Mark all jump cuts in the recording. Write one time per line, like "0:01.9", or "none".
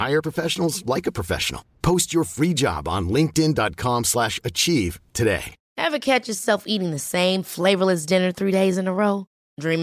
0:05.6

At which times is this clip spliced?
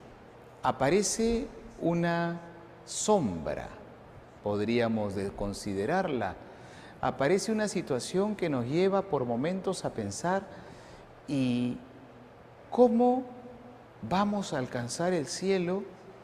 0:03.0

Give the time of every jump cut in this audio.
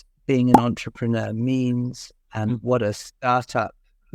none

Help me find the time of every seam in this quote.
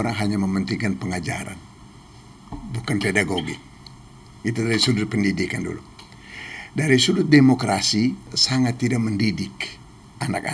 0:08.4

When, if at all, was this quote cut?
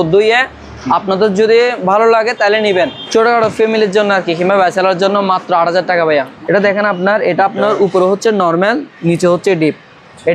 0:03.0
0:06.3

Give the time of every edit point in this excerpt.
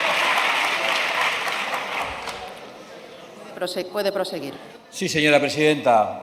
none

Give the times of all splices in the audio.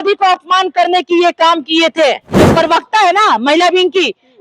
0:02.3

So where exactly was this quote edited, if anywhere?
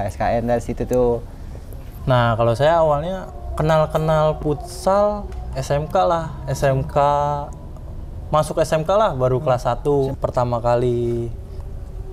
0:01.9
0:10.1

